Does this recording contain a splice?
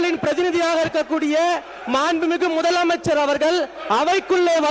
no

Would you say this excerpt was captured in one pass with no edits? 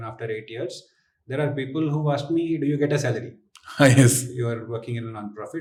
yes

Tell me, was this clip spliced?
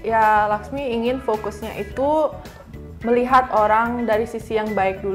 no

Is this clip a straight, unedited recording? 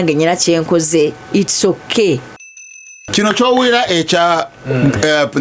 no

